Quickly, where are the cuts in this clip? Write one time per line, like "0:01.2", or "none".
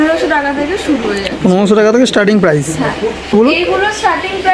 0:03.3